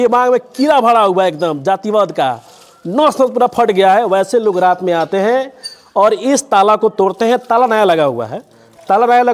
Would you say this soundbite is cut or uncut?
uncut